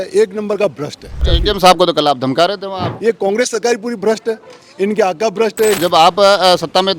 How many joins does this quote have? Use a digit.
3